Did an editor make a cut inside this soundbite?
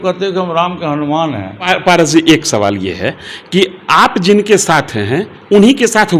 yes; 1 cut; at 1.7 s

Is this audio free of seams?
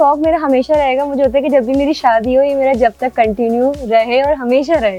yes; 0 cuts

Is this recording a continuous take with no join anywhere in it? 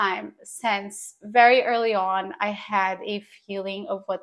yes; 0 cuts

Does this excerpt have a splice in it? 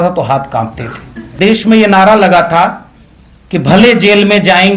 yes; 1 cut; at 1.2 s

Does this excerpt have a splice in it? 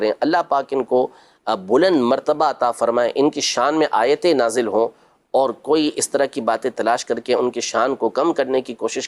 no; 0 cuts

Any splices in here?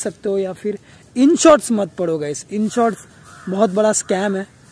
no; 0 cuts

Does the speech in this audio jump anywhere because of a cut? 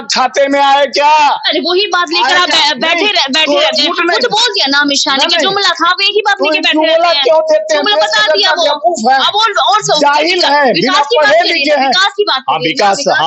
no; 0 cuts

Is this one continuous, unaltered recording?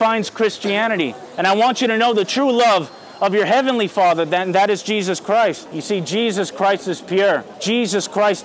no; 3 cuts; at 1.2 s, 5.7 s, 7.5 s

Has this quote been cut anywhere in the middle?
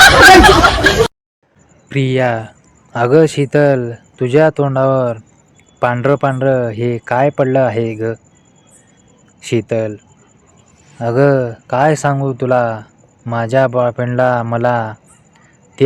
yes; 1 cut; at 1.2 s

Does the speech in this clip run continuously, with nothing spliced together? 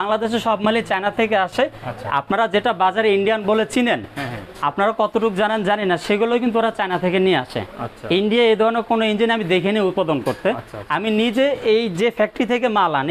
yes; 0 cuts

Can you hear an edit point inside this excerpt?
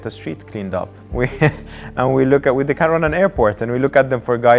no; 0 cuts

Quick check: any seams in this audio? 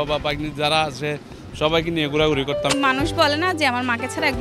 yes; 1 cut; at 2.7 s

